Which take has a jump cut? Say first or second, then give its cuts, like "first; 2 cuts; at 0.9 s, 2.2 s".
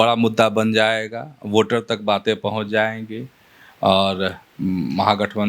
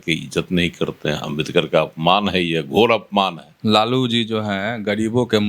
second; 1 cut; at 3.5 s